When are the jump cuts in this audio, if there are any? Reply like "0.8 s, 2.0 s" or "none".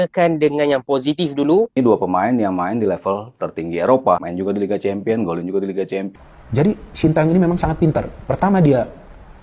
1.7 s, 4.3 s, 6.1 s